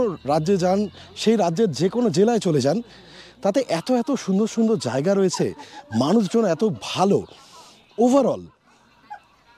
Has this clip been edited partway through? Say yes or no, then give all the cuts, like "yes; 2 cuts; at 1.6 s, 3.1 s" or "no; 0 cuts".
no; 0 cuts